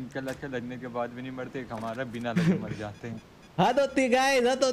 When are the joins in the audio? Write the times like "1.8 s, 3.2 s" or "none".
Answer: none